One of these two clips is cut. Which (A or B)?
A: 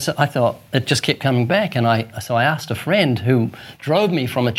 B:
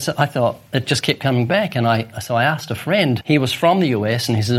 B